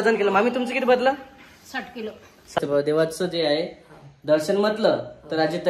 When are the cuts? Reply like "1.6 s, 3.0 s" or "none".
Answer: 2.6 s